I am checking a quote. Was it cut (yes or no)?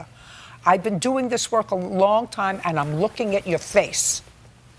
no